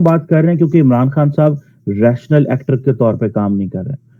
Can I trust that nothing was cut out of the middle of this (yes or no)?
yes